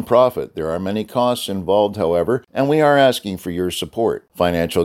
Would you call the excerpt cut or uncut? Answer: cut